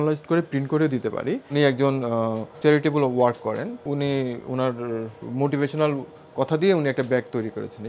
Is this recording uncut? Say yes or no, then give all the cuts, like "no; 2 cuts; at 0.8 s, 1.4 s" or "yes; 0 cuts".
no; 4 cuts; at 1.5 s, 2.5 s, 3.8 s, 5.2 s